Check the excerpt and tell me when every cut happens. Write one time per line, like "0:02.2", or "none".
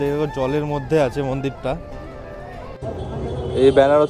0:02.7